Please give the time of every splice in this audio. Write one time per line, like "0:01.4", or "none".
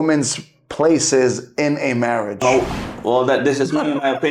0:02.4